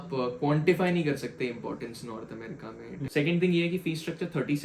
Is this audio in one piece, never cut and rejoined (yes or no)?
no